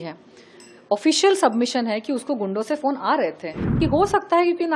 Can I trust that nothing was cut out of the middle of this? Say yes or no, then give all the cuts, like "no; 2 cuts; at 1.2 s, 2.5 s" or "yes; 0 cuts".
no; 1 cut; at 3.8 s